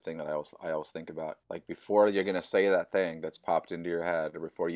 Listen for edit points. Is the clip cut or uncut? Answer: uncut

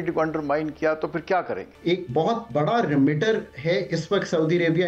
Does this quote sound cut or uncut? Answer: cut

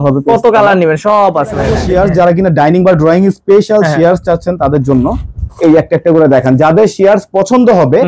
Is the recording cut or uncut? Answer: cut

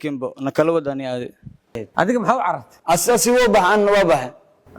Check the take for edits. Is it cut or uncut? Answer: cut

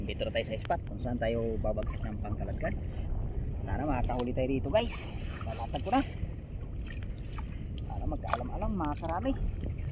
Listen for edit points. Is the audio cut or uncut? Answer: uncut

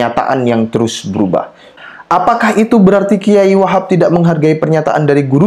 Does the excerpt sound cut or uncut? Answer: cut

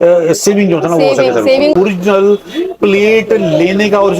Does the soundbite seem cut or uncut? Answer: cut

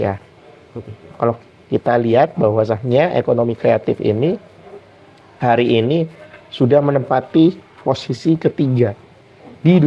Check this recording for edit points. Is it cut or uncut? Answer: uncut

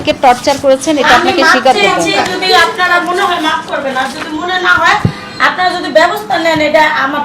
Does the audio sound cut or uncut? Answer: uncut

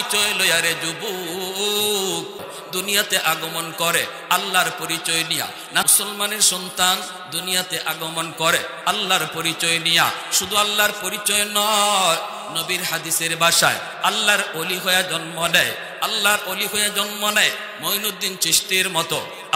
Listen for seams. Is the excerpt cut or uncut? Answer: cut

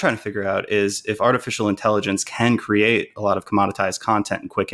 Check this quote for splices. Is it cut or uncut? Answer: uncut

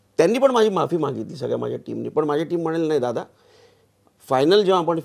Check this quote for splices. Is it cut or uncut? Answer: uncut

